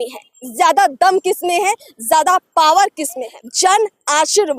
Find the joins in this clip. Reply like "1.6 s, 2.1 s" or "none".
3.4 s